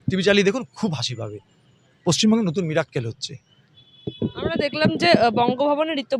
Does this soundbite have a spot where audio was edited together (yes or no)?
no